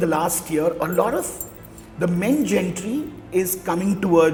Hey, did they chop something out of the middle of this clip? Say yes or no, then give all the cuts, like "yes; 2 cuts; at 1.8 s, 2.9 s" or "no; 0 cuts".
no; 0 cuts